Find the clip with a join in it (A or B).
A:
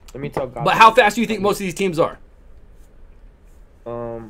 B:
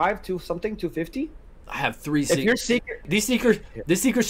B